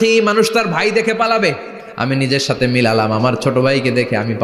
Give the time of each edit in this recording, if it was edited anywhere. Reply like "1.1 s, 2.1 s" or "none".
2.1 s